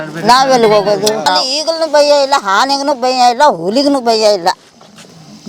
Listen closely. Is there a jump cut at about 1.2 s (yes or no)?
yes